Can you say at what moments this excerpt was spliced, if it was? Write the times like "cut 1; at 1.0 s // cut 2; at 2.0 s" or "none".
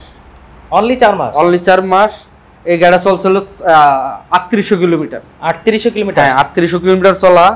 none